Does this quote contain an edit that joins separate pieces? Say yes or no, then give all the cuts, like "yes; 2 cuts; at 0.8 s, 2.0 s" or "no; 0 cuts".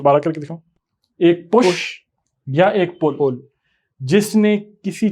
no; 0 cuts